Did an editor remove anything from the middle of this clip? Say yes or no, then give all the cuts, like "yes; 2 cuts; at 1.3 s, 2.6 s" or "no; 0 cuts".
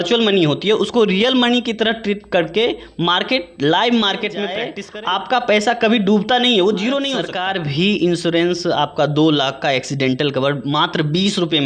yes; 2 cuts; at 4.8 s, 7.3 s